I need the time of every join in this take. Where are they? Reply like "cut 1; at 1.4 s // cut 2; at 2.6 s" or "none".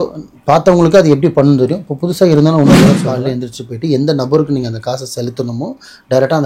cut 1; at 3.1 s